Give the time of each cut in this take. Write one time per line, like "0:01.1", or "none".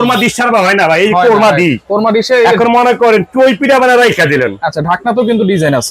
none